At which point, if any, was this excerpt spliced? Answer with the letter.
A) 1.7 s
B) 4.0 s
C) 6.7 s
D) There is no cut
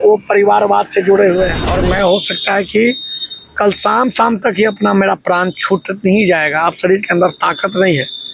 A